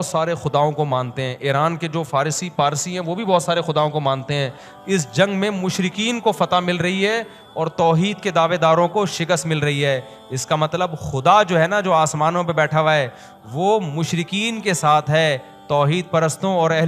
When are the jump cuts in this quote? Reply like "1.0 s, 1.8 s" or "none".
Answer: none